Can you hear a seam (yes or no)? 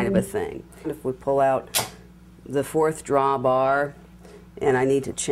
yes